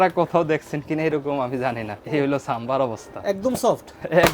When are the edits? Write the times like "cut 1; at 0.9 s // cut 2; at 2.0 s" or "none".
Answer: cut 1; at 1.9 s